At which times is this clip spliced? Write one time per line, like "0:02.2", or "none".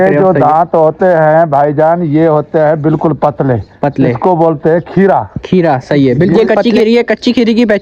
0:06.3